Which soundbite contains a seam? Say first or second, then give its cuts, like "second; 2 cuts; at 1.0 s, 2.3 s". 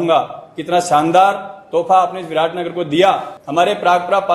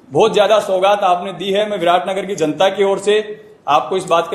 first; 1 cut; at 3.3 s